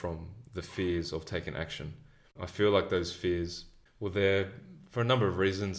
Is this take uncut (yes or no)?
yes